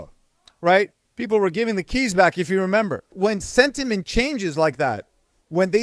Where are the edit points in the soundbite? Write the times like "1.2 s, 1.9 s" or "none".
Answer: 3.1 s